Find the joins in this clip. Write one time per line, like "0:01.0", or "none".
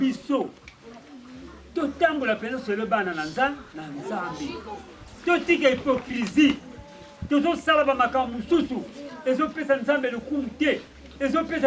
none